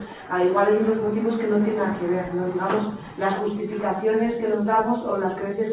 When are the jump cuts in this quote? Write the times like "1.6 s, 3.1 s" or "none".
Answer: none